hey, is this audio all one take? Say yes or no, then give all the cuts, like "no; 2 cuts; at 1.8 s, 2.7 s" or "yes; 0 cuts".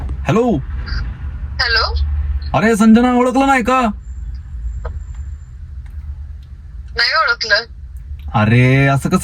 yes; 0 cuts